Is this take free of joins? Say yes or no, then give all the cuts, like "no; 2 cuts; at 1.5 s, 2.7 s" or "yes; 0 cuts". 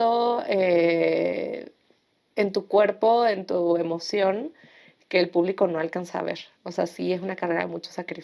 yes; 0 cuts